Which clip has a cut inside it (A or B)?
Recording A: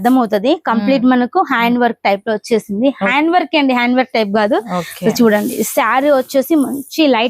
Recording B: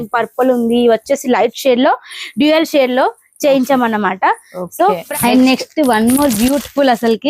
B